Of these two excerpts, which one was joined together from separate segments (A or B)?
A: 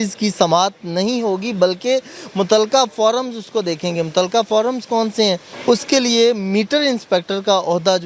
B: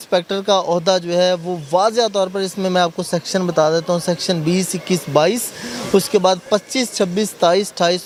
A